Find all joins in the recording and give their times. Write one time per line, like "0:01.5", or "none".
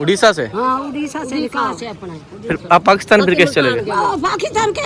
none